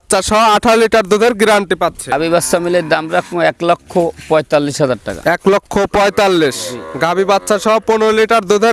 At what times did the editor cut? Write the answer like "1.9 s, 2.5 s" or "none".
2.1 s